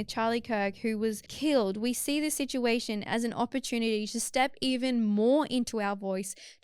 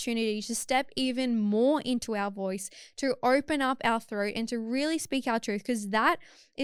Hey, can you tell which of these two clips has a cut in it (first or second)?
first